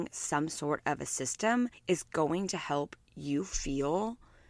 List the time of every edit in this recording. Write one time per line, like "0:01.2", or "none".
0:01.8